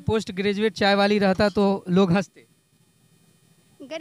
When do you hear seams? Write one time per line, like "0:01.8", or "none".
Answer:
none